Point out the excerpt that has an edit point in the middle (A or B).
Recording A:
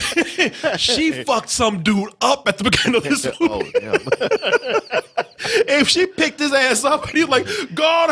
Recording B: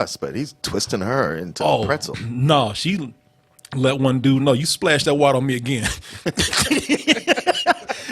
B